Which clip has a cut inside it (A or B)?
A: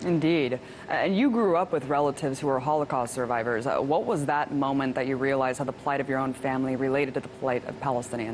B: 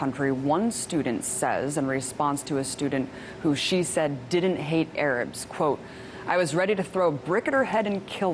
B